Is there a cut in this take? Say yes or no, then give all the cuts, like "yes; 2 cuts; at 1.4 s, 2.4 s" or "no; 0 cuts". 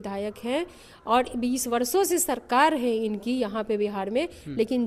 no; 0 cuts